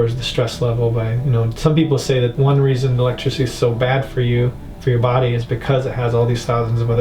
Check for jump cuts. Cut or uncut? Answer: cut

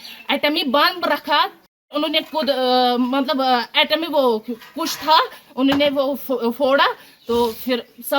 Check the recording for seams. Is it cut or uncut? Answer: cut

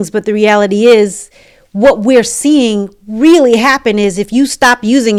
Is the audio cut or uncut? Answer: uncut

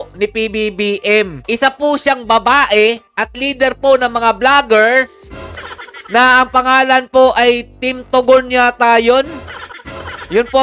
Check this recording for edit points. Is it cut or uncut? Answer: uncut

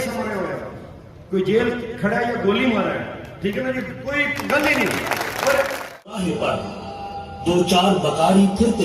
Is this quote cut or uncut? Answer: cut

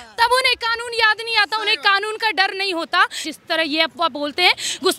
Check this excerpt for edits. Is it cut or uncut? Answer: cut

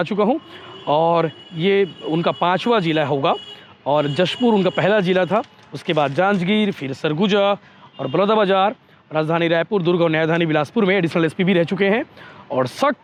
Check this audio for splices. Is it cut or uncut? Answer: uncut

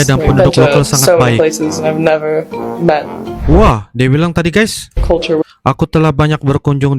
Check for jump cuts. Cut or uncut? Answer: uncut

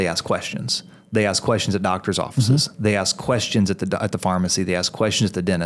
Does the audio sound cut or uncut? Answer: uncut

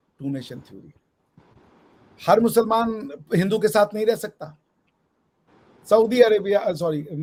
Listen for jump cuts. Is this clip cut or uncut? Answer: uncut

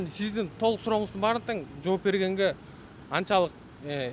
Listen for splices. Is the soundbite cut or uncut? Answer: uncut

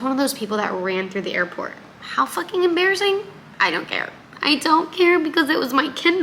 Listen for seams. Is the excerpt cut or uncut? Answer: uncut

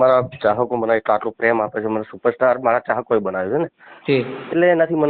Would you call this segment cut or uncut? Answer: uncut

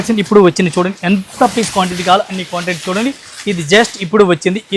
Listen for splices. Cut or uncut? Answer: uncut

